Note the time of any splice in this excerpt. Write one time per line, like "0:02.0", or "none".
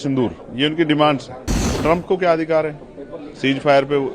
0:01.7